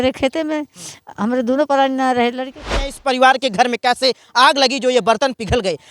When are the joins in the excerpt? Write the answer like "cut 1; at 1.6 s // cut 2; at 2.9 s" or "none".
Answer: cut 1; at 2.8 s